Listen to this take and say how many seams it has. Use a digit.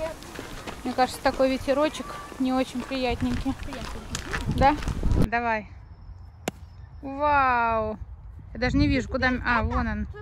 1